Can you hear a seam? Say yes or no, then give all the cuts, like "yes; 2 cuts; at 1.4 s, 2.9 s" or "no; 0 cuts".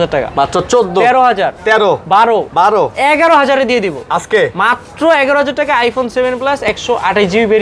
no; 0 cuts